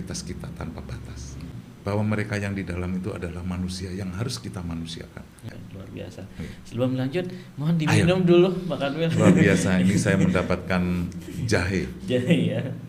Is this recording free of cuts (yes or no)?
no